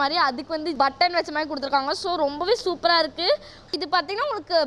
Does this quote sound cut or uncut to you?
cut